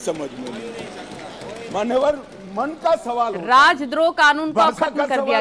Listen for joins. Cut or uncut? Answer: uncut